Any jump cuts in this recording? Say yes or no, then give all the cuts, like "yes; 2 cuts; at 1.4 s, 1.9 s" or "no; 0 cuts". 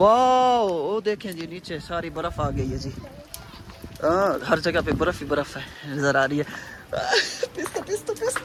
no; 0 cuts